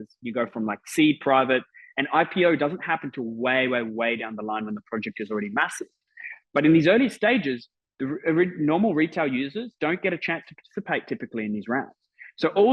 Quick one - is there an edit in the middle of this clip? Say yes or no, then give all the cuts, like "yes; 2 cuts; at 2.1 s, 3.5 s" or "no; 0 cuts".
no; 0 cuts